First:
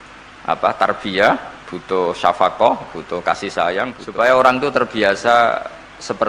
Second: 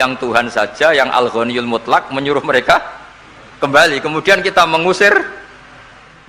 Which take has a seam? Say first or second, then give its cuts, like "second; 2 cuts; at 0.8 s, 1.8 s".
first; 1 cut; at 4.0 s